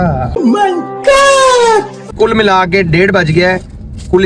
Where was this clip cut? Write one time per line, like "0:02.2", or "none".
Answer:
0:02.1